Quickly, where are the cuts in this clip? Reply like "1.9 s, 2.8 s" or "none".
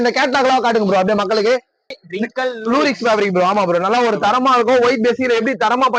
2.0 s